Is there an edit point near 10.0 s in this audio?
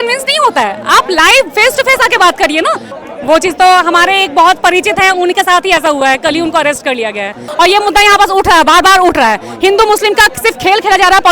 no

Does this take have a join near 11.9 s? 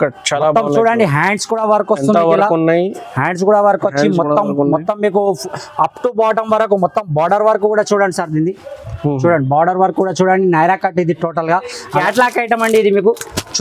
yes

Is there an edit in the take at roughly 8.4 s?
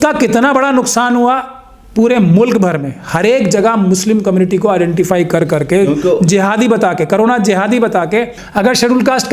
yes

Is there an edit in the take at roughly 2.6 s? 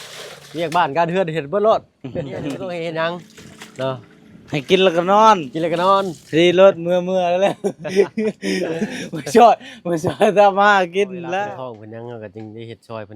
yes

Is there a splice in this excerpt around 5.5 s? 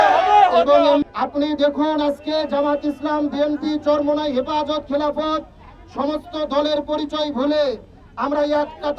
no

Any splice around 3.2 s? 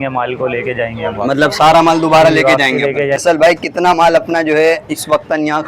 yes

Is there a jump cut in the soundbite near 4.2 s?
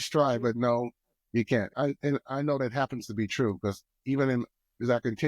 no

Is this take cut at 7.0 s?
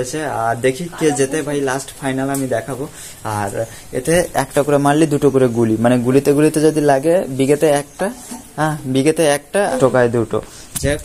no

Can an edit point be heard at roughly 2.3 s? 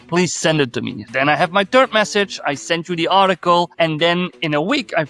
no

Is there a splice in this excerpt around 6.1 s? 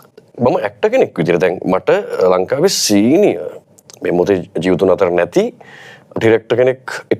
yes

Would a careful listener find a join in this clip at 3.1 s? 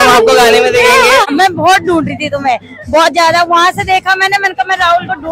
no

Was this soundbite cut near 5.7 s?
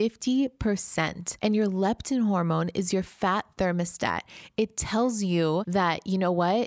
yes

